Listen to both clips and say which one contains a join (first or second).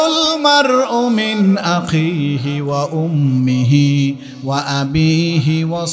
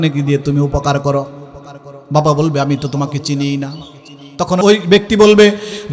second